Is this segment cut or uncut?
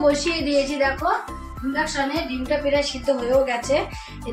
uncut